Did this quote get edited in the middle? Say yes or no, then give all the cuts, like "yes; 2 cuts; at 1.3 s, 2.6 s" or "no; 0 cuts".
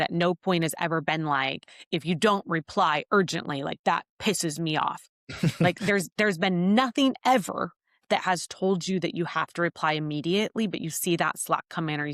no; 0 cuts